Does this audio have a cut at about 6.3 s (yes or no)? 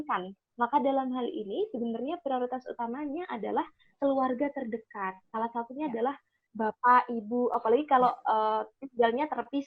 no